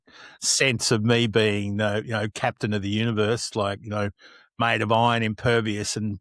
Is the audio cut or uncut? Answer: uncut